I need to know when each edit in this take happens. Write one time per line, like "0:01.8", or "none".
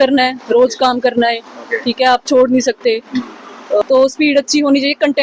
0:03.8